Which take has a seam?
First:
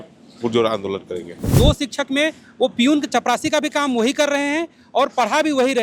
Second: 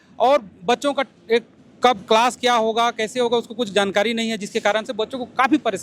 first; 1 cut; at 1.4 s

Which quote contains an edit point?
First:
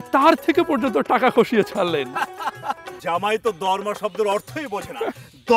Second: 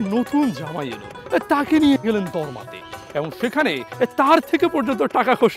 first; 1 cut; at 3.0 s

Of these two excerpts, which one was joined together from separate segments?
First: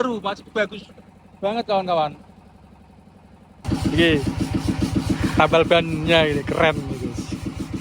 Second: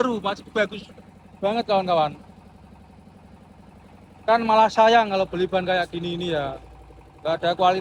first; 1 cut; at 3.6 s

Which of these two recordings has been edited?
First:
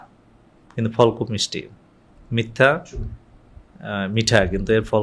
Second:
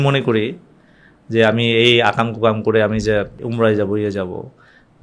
second; 1 cut; at 3.4 s

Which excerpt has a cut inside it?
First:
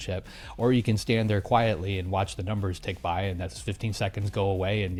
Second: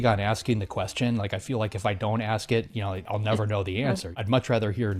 second; 2 cuts; at 3.0 s, 4.2 s

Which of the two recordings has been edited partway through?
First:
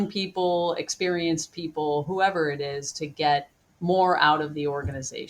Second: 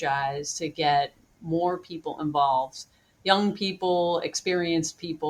first; 1 cut; at 3.6 s

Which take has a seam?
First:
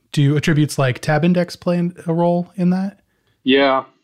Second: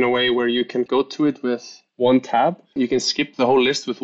second; 2 cuts; at 0.9 s, 2.8 s

